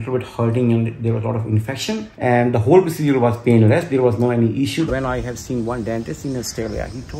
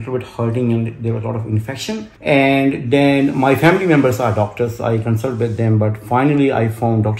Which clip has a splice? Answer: first; 2 cuts; at 2.1 s, 4.9 s

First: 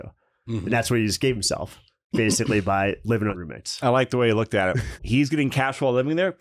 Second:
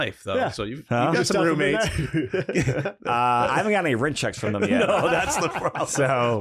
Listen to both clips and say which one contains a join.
first; 2 cuts; at 3.4 s, 4.9 s

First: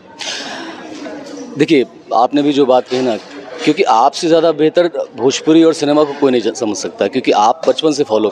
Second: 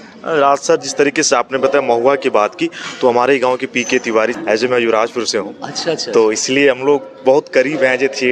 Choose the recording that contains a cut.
second; 1 cut; at 4.4 s

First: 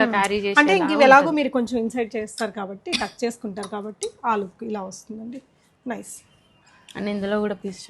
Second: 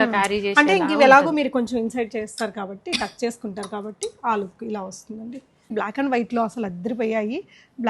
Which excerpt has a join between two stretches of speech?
second; 1 cut; at 5.7 s

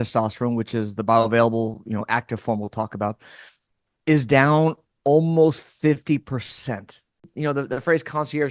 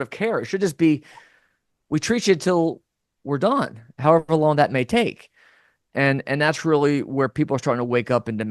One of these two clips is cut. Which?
first; 1 cut; at 7.3 s

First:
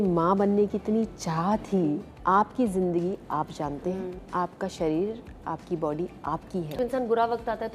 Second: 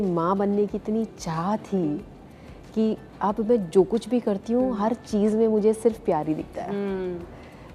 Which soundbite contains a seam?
first; 3 cuts; at 2.1 s, 4.2 s, 6.8 s

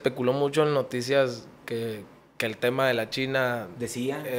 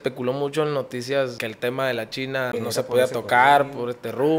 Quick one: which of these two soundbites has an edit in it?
second; 2 cuts; at 1.4 s, 2.5 s

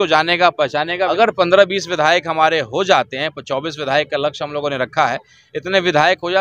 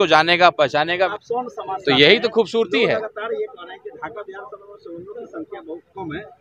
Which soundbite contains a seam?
first; 1 cut; at 1.1 s

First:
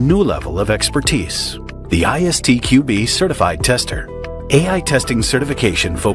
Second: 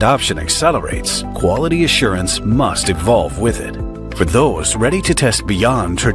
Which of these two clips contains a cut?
first; 1 cut; at 4.4 s

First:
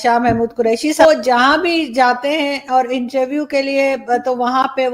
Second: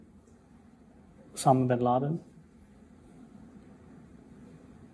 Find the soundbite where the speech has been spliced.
first; 1 cut; at 1.0 s

